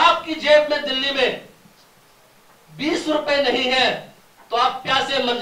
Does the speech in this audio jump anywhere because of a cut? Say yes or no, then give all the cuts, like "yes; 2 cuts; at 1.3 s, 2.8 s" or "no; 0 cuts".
no; 0 cuts